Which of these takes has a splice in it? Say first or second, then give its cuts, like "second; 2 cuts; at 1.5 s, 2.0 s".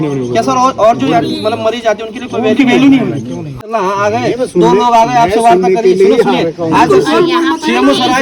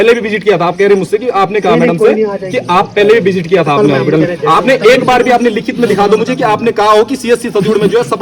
first; 1 cut; at 3.6 s